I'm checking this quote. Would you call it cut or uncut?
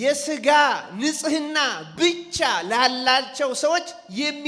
uncut